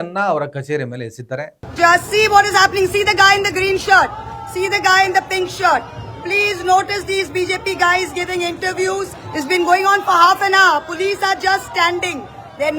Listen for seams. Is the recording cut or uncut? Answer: cut